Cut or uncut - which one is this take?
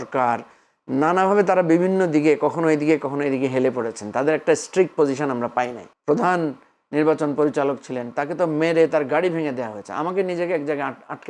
cut